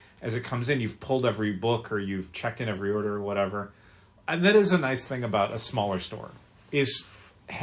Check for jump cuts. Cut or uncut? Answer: uncut